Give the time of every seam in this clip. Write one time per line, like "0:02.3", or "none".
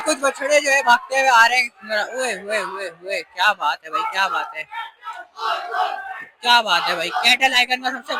none